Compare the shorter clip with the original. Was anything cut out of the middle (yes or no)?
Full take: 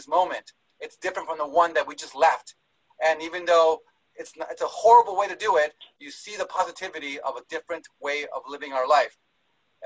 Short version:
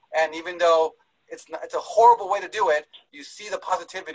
no